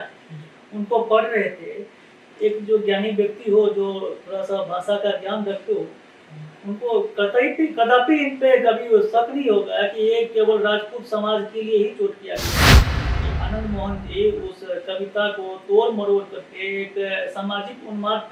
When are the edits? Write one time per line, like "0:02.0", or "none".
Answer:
none